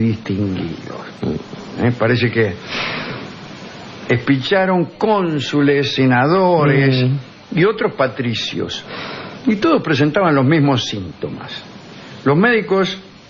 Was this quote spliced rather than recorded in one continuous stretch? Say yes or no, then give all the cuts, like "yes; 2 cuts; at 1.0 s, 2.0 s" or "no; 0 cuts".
yes; 1 cut; at 2.2 s